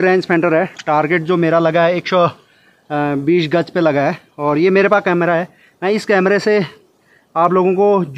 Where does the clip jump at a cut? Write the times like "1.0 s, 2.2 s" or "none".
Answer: none